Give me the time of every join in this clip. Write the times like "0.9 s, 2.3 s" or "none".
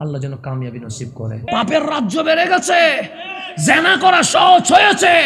1.4 s